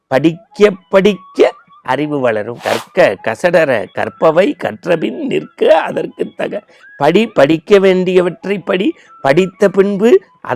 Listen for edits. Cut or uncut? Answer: cut